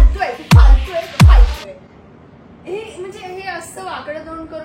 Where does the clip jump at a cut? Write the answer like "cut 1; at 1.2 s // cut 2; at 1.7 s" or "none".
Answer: none